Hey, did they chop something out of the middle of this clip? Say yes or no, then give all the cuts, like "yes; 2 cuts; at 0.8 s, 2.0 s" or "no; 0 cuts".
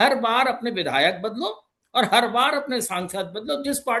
no; 0 cuts